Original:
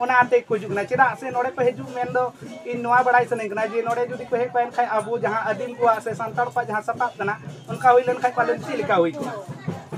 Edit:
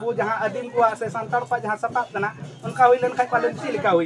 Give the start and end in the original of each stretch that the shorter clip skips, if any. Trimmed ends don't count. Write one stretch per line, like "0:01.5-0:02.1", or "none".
none

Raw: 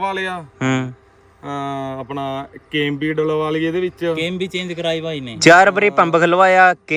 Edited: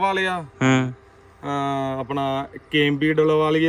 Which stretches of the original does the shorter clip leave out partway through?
none

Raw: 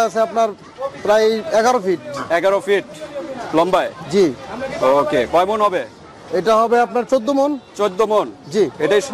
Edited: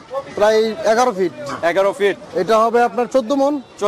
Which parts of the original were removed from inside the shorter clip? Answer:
0:02.9-0:06.2

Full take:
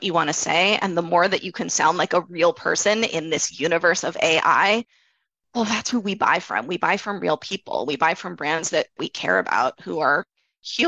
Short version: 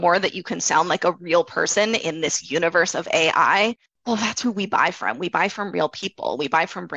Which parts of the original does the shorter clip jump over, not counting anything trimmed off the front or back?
0:05.0-0:05.4

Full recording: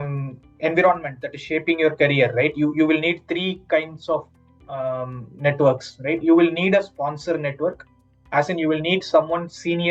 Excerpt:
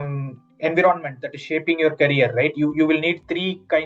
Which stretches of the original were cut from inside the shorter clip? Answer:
none

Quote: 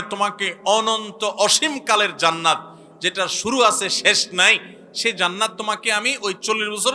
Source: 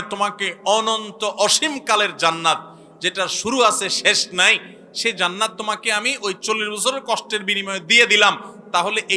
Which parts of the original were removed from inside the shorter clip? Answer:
none

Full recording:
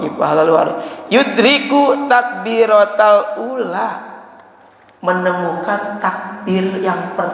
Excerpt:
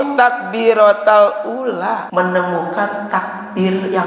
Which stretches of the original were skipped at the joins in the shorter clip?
0:04.0-0:05.0

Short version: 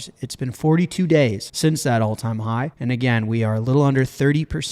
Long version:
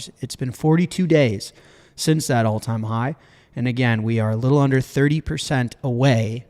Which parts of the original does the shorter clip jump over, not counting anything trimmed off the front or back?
0:01.5-0:01.9
0:03.2-0:03.5

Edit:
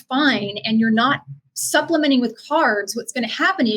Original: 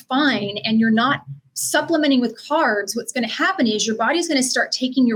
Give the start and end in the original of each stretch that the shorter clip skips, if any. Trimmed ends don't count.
none

